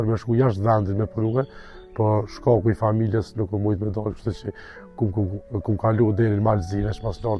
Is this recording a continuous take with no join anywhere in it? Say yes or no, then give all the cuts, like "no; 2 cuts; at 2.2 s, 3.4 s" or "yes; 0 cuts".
yes; 0 cuts